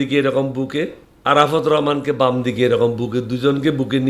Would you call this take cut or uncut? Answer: cut